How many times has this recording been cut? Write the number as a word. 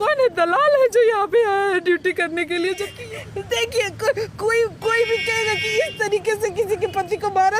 one